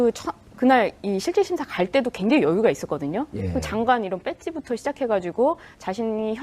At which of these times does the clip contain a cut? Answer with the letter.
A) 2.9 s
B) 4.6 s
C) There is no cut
A